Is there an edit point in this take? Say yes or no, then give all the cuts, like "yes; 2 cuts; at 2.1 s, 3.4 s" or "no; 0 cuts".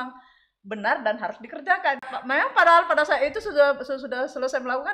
yes; 1 cut; at 2.2 s